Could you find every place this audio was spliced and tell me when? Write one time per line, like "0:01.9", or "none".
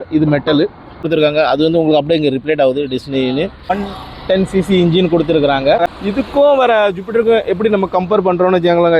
0:01.0
0:03.7
0:05.9